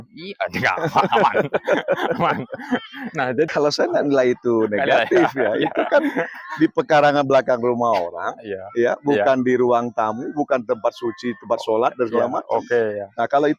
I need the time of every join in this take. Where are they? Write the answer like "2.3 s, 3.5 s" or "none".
3.5 s